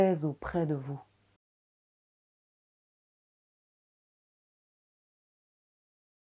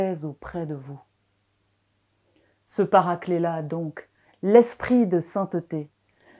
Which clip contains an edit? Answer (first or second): second